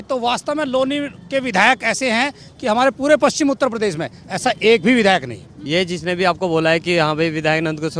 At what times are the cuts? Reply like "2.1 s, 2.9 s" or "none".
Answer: 5.6 s